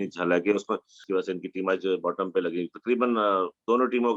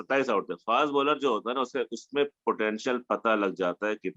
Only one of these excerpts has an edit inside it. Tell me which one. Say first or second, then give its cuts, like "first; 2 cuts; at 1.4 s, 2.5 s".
first; 1 cut; at 1.0 s